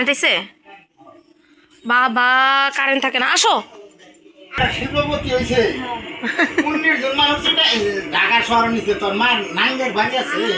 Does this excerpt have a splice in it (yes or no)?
yes